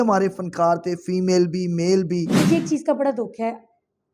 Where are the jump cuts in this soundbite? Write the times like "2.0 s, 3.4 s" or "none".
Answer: 2.4 s